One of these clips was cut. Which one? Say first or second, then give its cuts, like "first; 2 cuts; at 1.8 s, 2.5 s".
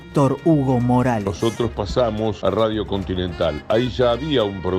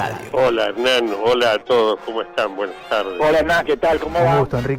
first; 2 cuts; at 1.3 s, 2.4 s